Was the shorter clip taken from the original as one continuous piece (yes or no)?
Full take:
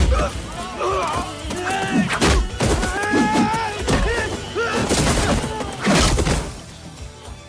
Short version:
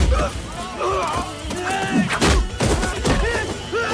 no